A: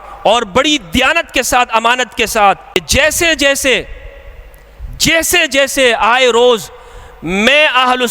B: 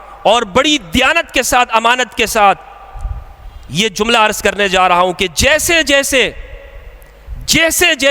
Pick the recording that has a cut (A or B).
A